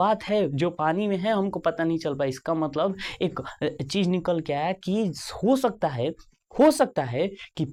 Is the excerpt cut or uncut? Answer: uncut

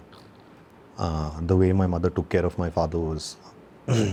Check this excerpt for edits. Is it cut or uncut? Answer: uncut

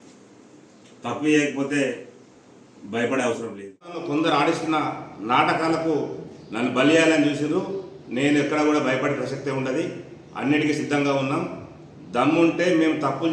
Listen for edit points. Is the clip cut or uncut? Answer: cut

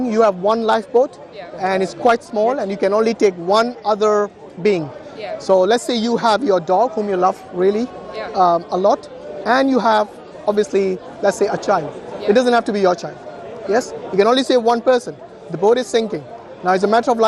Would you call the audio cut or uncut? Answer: uncut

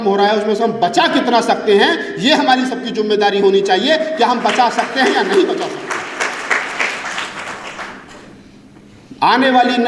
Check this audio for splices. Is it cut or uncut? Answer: uncut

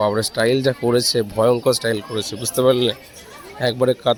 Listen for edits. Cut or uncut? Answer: uncut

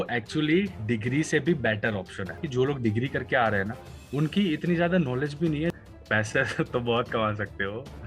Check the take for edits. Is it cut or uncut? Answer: cut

